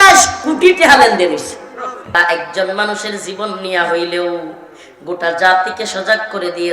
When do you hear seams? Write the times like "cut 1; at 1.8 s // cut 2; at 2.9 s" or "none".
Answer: cut 1; at 2.2 s